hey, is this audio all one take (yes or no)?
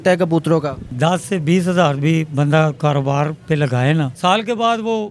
no